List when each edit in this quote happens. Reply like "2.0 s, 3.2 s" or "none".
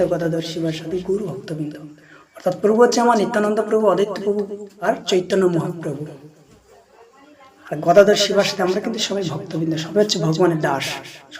4.7 s